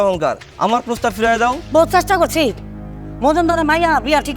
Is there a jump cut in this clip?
yes; 1 cut; at 1.6 s

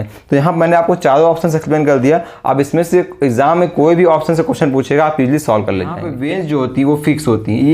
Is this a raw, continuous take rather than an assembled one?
no; 1 cut; at 6.1 s

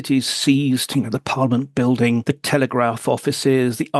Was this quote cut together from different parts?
yes; 1 cut; at 2.2 s

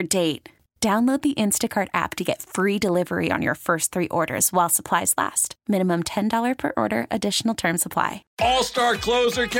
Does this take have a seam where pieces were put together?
yes; 1 cut; at 8.2 s

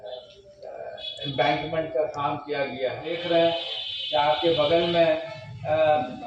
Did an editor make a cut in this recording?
yes; 1 cut; at 3.1 s

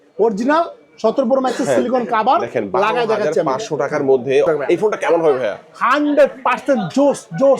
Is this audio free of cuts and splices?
no; 1 cut; at 4.5 s

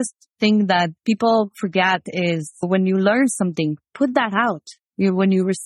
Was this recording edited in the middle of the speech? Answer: yes; 1 cut; at 0.9 s

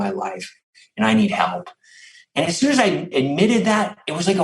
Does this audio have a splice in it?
yes; 1 cut; at 3.1 s

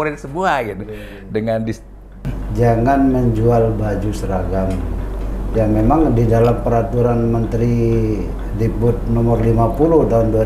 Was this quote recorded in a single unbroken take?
no; 1 cut; at 2.3 s

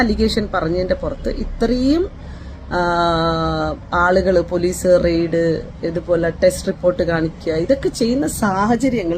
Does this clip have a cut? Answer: no; 0 cuts

